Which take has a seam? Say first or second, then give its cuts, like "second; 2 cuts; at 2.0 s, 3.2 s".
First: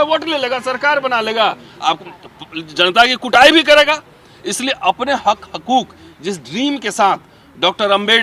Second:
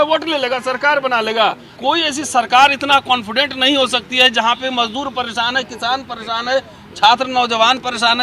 second; 1 cut; at 1.7 s